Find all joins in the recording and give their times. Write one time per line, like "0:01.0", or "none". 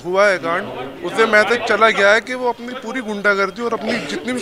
none